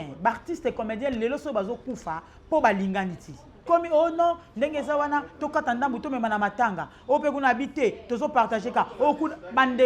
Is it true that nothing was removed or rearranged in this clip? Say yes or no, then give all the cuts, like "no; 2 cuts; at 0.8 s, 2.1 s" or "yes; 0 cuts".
no; 1 cut; at 3.6 s